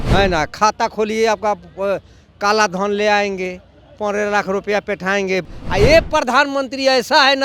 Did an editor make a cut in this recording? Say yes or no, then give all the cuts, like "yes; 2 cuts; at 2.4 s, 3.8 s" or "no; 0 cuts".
yes; 1 cut; at 5.4 s